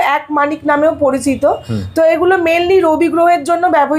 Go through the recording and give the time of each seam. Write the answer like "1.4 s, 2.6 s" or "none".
none